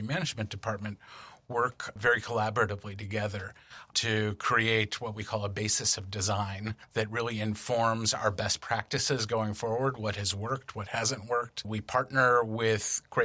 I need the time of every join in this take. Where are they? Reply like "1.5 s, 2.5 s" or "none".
6.8 s, 11.7 s